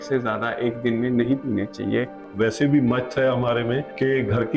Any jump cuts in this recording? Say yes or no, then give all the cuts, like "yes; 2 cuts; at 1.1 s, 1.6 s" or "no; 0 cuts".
yes; 1 cut; at 2.1 s